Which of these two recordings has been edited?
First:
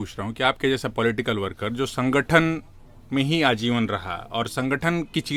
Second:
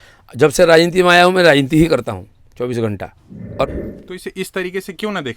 second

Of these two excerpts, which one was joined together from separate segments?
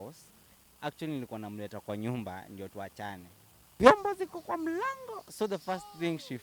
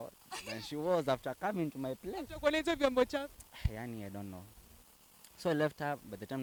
first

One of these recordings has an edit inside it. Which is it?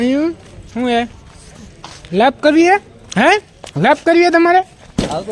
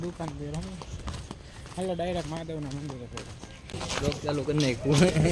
second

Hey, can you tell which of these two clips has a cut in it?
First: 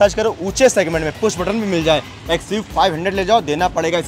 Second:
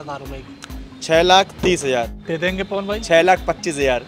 second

